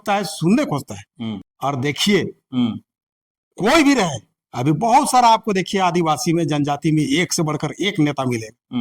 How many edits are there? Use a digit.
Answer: 1